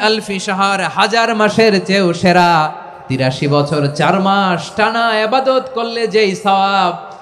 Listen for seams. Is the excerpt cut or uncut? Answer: cut